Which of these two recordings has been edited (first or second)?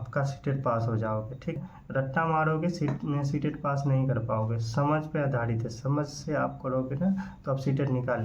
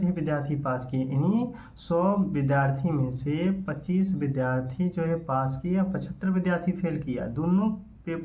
first